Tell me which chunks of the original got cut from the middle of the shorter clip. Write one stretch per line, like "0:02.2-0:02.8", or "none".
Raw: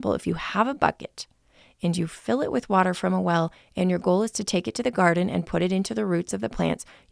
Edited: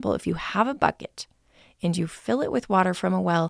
none